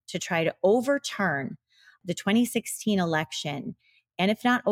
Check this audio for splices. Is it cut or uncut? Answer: cut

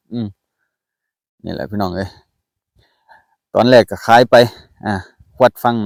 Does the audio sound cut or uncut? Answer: uncut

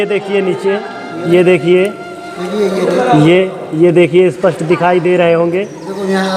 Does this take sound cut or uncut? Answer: uncut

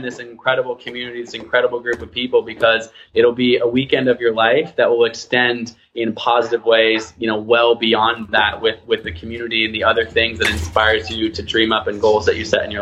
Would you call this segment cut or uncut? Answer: uncut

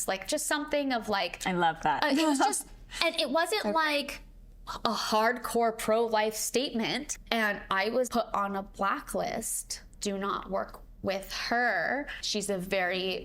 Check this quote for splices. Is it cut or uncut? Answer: cut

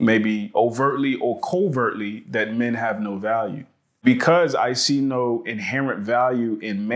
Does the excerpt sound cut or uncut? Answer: cut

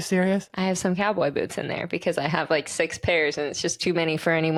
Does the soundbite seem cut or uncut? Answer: uncut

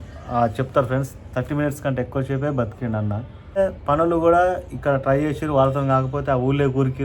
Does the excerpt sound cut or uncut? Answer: cut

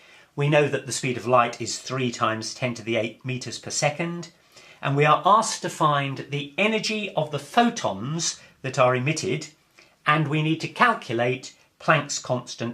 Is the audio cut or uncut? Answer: cut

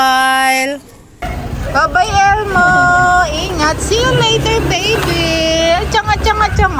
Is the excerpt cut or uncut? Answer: cut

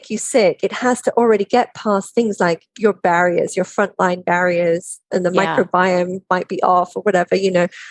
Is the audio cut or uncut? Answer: cut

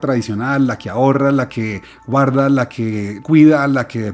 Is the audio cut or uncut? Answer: cut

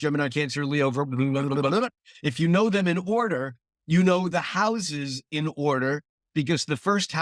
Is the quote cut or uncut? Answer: uncut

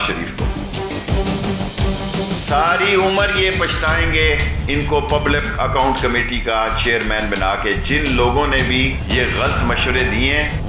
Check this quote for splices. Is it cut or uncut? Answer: uncut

